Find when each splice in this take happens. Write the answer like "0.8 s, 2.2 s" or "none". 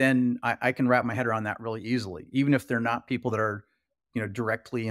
none